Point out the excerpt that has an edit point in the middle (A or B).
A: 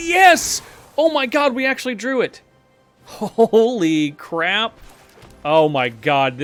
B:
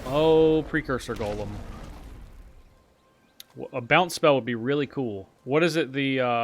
B